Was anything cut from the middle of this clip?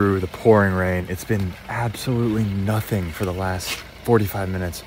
yes; 1 cut; at 1.1 s

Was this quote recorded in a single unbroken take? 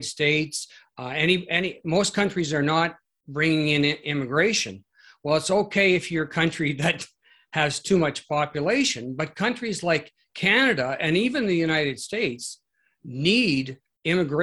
yes; 0 cuts

